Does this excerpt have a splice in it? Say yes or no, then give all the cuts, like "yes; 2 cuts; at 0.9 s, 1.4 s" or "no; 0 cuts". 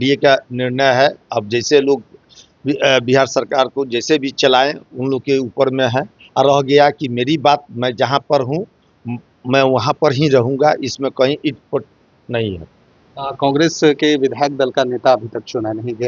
no; 0 cuts